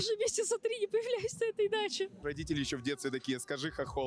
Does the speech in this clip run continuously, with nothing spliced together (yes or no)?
no